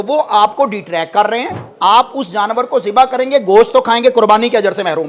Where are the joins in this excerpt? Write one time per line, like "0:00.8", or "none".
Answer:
0:01.6